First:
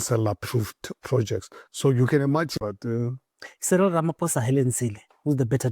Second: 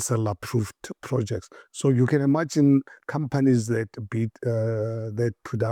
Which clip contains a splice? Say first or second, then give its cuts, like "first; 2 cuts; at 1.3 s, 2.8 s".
first; 1 cut; at 2.6 s